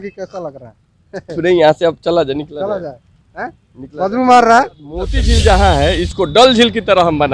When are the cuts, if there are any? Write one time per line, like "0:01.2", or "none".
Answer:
0:05.2